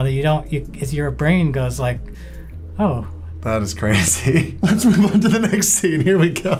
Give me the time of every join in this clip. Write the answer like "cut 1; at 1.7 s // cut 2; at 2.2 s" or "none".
none